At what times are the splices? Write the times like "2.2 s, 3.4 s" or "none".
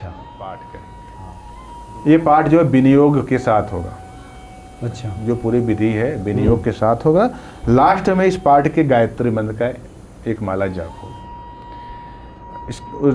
1.1 s